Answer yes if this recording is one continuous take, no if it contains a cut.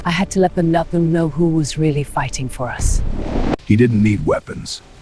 yes